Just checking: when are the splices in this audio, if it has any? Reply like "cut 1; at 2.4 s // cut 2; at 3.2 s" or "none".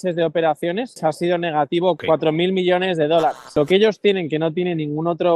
cut 1; at 1.0 s // cut 2; at 2.0 s // cut 3; at 3.5 s